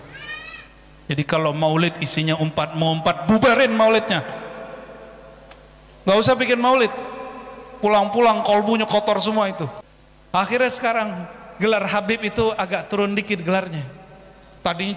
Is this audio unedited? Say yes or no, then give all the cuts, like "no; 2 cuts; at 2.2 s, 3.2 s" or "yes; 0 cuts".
no; 1 cut; at 10.5 s